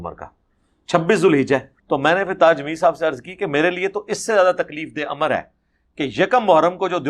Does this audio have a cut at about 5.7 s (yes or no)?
no